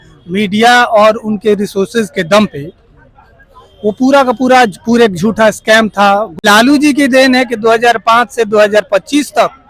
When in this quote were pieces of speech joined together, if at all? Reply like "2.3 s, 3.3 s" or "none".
6.4 s